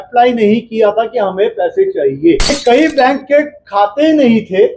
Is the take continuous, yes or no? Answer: no